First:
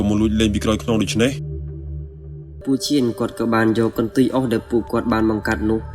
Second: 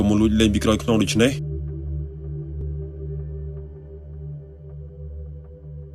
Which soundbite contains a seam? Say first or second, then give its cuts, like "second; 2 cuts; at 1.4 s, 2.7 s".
first; 1 cut; at 2.6 s